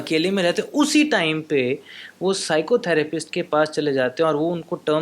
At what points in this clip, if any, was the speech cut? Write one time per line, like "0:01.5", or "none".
none